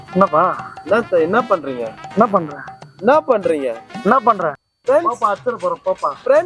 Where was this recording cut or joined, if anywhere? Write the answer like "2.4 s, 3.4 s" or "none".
4.7 s